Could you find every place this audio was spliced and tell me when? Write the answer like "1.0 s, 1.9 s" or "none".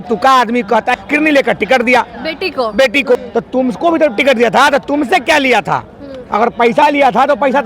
0.9 s, 3.2 s